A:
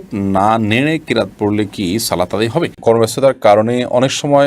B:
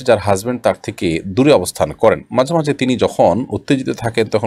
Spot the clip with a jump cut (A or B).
A